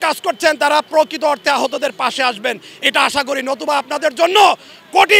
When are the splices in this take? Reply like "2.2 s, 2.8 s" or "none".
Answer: none